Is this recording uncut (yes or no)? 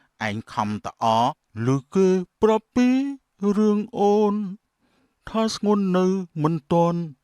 no